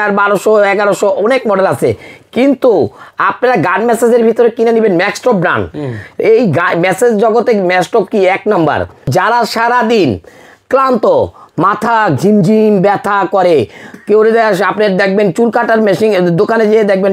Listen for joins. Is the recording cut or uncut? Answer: cut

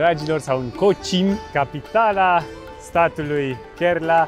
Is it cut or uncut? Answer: cut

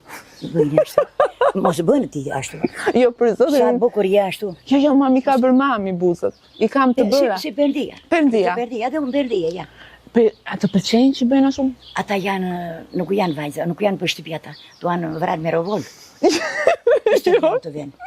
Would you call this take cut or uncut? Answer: uncut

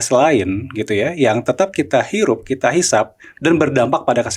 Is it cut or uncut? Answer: uncut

